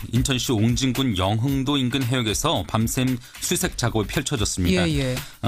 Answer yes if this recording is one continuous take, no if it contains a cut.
no